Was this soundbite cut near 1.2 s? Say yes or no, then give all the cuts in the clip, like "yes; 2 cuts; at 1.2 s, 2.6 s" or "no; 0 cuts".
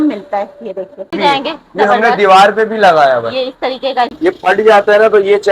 yes; 2 cuts; at 1.2 s, 4.1 s